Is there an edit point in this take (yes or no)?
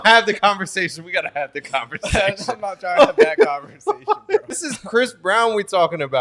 yes